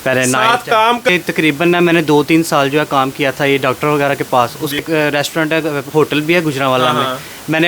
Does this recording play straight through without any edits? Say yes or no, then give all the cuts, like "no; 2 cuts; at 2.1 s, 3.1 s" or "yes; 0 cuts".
no; 2 cuts; at 1.1 s, 4.8 s